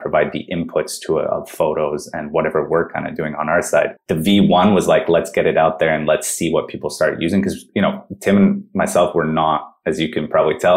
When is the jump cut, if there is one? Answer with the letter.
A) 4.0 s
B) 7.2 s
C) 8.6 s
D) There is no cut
A